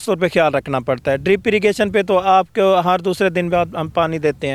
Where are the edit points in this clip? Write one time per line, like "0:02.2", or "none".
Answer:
none